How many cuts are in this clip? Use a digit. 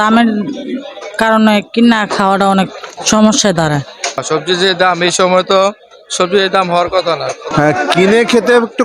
2